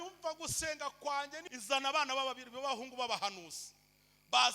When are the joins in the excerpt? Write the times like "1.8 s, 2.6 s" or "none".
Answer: 1.4 s